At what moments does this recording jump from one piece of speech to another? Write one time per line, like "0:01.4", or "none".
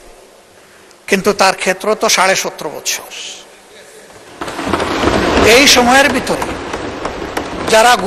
none